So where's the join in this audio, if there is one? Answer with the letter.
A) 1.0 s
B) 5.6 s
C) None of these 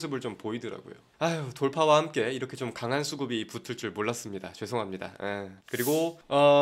B